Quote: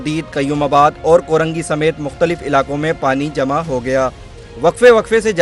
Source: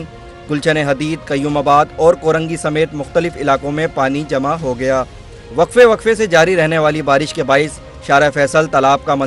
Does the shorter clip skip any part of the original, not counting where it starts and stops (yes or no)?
no